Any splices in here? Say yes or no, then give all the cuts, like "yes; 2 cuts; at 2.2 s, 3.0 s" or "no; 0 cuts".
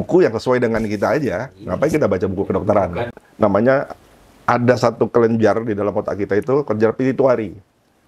yes; 1 cut; at 3.1 s